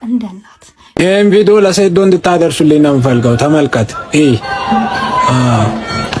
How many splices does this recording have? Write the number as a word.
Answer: one